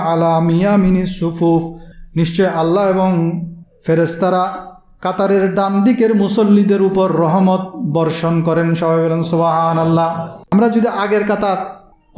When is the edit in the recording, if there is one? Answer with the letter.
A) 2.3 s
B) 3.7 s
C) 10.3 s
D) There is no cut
C